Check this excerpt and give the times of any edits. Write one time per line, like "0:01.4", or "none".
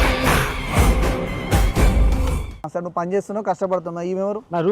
0:02.6